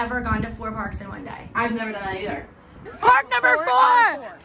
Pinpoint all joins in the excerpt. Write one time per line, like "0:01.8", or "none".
0:02.9